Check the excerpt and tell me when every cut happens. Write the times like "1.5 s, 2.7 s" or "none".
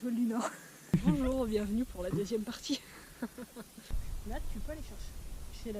0.9 s, 4.0 s